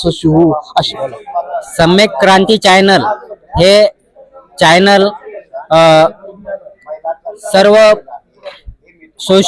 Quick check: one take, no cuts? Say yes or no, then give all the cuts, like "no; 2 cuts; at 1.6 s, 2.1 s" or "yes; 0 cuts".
no; 1 cut; at 0.9 s